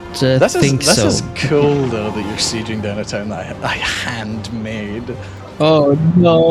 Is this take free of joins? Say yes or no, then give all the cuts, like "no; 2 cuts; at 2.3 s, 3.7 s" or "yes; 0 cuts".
yes; 0 cuts